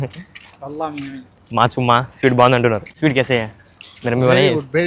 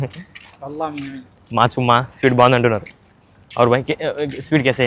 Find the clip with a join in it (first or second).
first